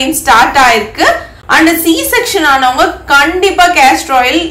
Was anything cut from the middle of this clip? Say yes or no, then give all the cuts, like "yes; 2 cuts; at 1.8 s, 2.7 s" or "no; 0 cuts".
yes; 1 cut; at 1.3 s